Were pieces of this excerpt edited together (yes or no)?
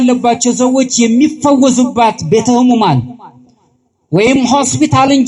no